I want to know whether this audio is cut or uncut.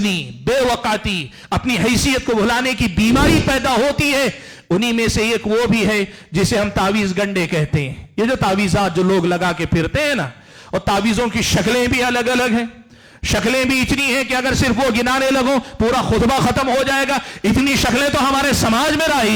uncut